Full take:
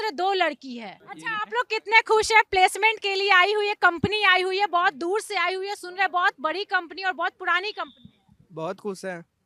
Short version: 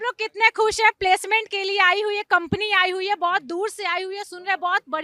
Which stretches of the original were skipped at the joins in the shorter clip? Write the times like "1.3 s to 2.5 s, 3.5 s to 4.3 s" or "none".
none